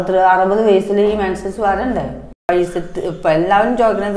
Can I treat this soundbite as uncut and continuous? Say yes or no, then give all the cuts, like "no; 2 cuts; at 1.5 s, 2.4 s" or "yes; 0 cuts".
no; 1 cut; at 2.4 s